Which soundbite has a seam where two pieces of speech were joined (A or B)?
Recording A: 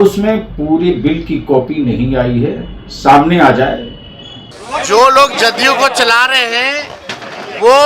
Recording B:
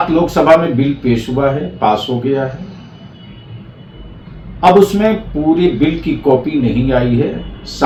A